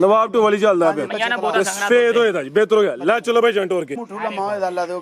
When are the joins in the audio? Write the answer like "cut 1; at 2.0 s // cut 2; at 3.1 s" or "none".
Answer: cut 1; at 4.1 s